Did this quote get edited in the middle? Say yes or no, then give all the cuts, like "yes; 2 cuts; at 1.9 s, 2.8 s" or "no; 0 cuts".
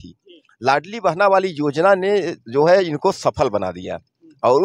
no; 0 cuts